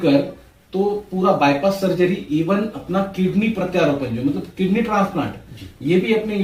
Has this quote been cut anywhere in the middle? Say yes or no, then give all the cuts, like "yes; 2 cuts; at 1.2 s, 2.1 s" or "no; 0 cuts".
no; 0 cuts